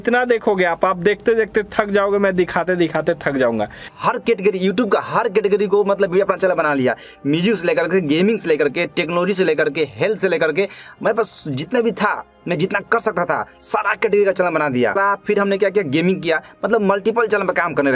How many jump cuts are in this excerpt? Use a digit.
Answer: 2